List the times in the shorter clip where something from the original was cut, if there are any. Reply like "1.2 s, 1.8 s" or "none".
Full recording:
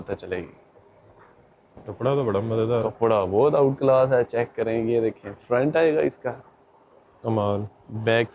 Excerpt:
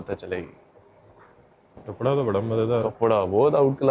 none